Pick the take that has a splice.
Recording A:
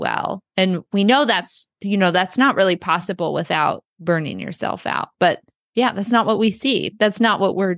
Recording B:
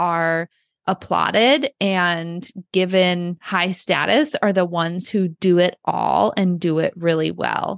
A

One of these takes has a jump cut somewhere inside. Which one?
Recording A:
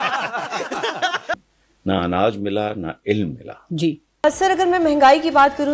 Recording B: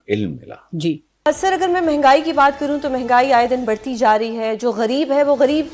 A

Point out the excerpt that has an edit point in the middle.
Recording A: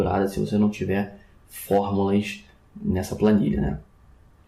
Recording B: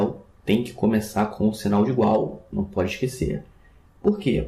A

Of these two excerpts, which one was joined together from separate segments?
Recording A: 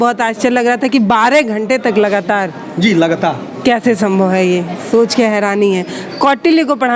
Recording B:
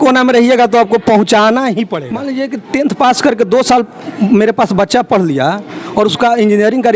B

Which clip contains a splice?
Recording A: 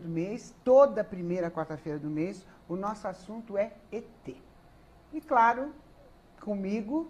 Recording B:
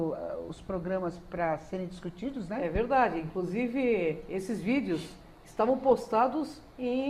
B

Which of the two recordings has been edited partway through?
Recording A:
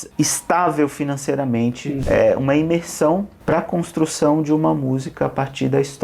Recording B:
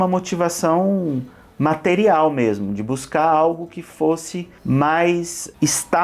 A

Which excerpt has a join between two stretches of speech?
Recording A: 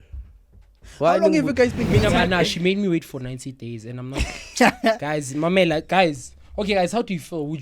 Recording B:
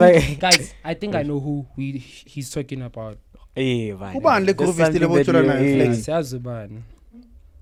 A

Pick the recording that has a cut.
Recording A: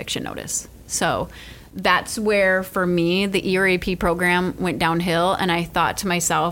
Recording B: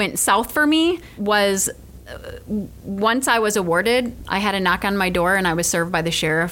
B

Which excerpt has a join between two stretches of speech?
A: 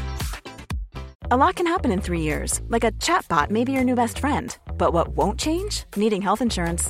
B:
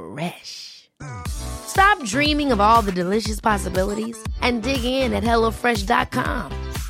A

